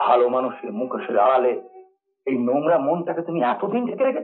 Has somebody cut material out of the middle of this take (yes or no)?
no